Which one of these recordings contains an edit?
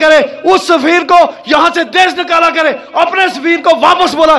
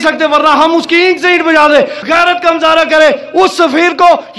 second; 1 cut; at 2.0 s

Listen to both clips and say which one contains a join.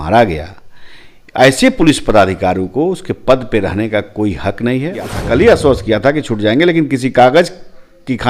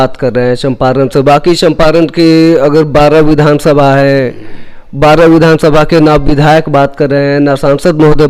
first; 1 cut; at 5.2 s

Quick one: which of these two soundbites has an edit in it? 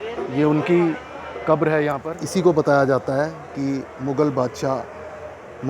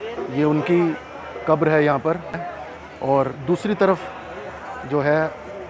first; 1 cut; at 2.1 s

